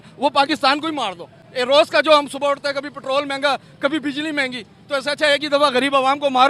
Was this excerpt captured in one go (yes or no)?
yes